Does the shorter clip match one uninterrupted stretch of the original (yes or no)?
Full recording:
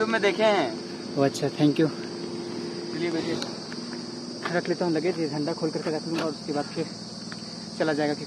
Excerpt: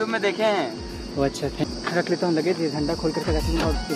no